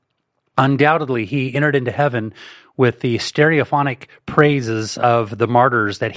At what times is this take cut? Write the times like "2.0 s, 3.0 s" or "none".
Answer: none